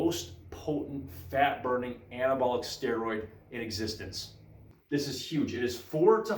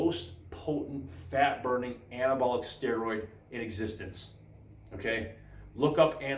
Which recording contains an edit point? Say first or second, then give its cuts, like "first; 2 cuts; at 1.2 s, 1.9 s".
first; 1 cut; at 4.8 s